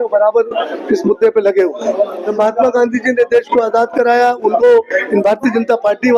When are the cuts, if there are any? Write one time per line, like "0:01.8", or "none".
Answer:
0:02.3